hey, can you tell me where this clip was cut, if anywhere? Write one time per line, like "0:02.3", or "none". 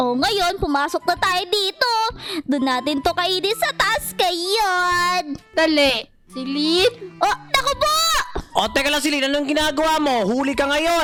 none